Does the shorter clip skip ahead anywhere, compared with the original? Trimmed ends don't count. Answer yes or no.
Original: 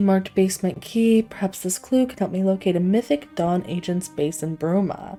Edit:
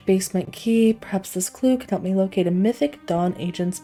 no